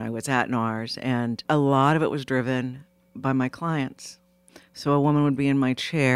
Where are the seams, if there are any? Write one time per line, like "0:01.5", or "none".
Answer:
0:01.4